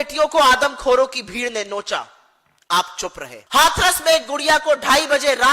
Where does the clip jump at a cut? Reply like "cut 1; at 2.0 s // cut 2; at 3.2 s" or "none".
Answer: cut 1; at 3.3 s